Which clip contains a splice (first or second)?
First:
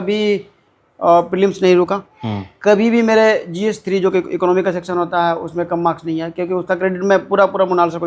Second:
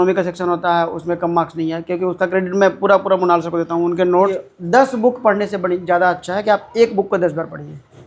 second